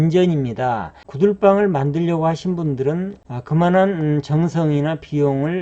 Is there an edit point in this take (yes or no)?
yes